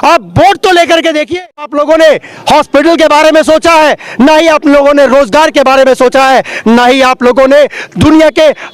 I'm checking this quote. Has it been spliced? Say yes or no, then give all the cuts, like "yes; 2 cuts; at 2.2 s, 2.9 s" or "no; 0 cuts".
yes; 1 cut; at 1.7 s